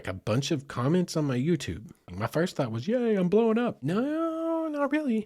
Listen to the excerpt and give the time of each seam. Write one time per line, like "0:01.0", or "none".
0:02.1
0:03.8